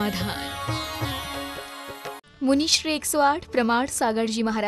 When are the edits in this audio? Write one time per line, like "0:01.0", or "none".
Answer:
0:02.2

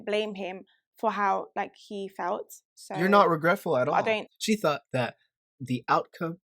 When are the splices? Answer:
0:04.3

